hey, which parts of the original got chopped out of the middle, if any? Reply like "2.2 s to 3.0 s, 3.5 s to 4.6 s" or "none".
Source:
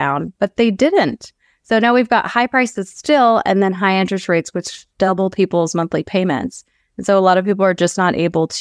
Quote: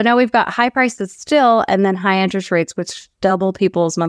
none